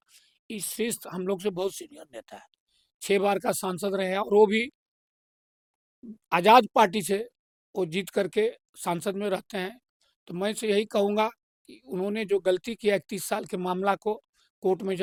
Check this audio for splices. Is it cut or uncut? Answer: uncut